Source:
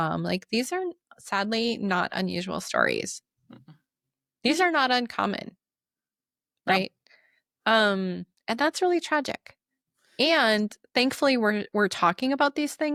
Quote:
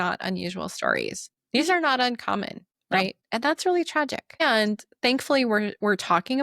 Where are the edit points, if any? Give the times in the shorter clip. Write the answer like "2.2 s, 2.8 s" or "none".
1.3 s, 3.2 s, 4.4 s